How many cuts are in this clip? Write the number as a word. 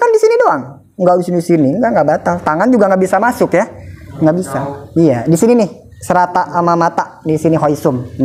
zero